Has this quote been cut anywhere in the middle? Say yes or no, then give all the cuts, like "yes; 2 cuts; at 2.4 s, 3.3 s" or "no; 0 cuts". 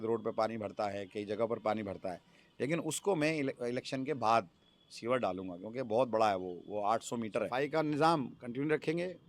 yes; 1 cut; at 7.5 s